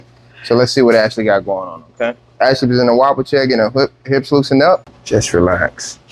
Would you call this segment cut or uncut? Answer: cut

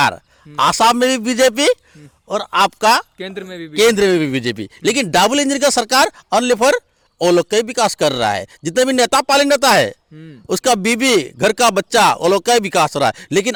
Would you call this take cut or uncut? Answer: uncut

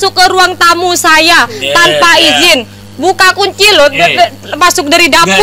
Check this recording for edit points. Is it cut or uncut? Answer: uncut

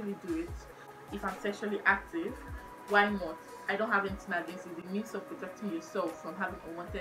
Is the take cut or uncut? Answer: uncut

